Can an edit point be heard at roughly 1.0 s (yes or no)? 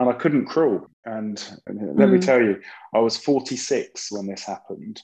no